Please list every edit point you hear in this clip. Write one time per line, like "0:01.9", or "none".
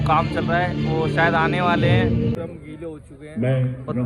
0:02.4